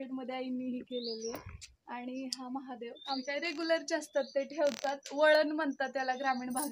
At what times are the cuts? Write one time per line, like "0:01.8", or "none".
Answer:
0:03.2